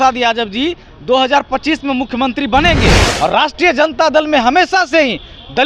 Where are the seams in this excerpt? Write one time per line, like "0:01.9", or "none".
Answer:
0:03.1